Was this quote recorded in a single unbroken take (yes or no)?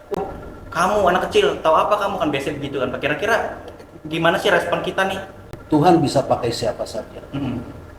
no